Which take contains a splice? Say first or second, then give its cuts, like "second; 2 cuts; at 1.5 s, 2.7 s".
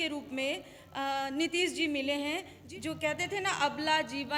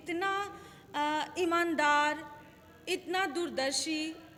first; 1 cut; at 2.5 s